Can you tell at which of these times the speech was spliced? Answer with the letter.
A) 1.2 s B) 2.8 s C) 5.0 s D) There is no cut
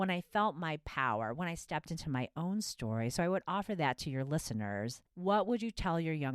C